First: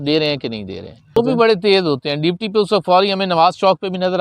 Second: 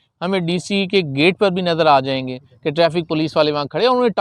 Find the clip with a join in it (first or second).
first